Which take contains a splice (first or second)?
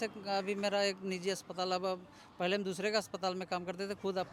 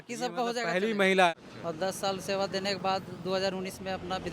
second